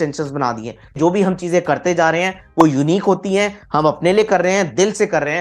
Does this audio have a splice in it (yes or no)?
yes